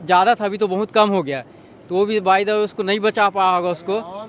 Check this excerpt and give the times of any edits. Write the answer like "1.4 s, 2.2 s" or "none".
none